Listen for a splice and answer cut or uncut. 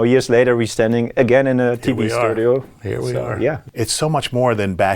cut